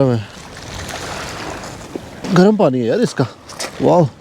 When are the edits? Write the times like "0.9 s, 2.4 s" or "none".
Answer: 2.2 s